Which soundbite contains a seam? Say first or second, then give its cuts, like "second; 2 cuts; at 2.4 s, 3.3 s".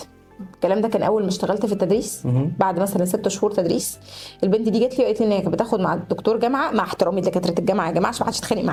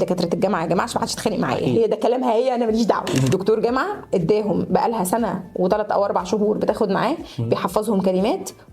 second; 1 cut; at 3.2 s